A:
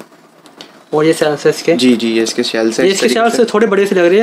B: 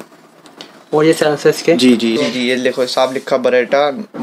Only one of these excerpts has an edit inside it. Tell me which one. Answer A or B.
B